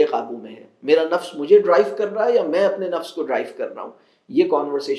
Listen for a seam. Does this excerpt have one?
no; 0 cuts

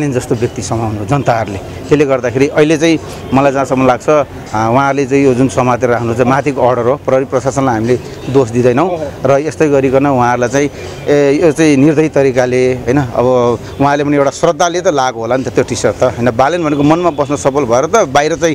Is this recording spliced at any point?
no; 0 cuts

